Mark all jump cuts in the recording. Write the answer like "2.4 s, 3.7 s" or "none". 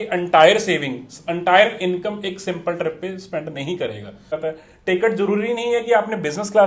4.4 s